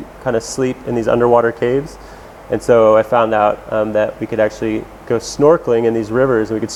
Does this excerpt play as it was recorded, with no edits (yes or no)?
yes